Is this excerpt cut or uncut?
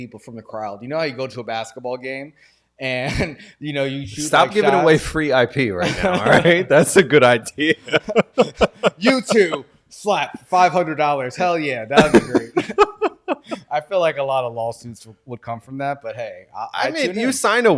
uncut